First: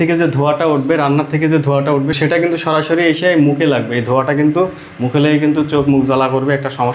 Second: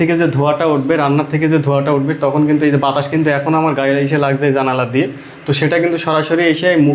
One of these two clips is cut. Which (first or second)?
first